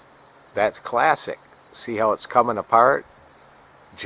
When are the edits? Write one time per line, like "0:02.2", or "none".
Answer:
0:02.4